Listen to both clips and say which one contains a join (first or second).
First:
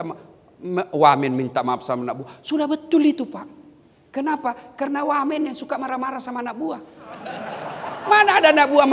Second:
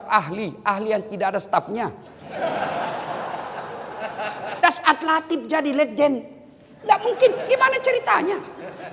second